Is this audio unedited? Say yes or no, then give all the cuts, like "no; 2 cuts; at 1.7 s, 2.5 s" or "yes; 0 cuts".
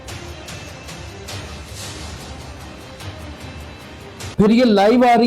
no; 1 cut; at 4.3 s